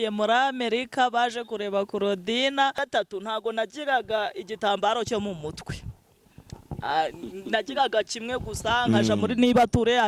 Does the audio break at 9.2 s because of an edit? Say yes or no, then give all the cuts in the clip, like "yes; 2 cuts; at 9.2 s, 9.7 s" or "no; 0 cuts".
no; 1 cut; at 2.8 s